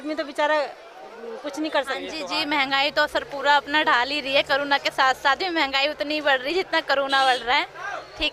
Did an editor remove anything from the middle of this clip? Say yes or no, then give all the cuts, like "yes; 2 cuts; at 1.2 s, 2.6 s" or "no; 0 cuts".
yes; 1 cut; at 2.1 s